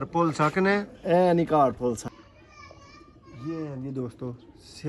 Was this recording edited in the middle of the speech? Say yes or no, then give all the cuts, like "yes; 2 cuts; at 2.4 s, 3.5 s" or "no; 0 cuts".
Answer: yes; 1 cut; at 2.1 s